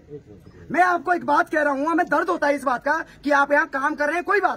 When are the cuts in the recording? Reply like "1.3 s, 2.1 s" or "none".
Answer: none